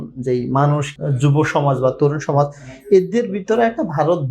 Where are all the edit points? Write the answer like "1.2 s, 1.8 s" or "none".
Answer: 0.9 s